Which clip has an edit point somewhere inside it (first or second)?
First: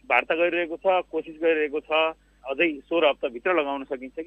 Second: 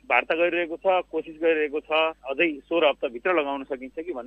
second